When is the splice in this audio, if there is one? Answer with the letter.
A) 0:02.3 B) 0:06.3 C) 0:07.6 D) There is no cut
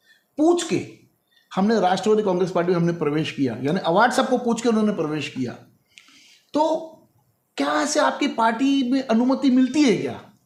D